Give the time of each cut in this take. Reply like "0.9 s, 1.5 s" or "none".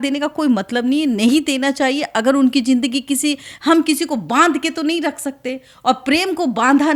none